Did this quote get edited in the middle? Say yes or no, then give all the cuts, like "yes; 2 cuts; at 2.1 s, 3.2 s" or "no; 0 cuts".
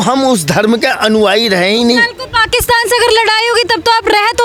no; 0 cuts